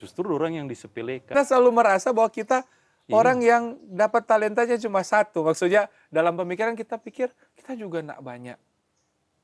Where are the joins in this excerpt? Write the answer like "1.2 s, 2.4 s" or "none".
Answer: 1.3 s